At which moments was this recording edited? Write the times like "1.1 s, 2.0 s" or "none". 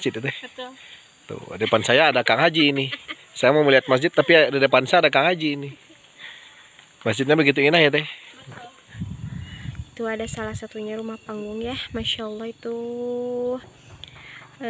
9.0 s